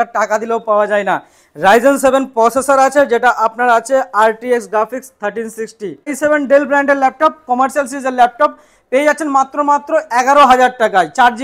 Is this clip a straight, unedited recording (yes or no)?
no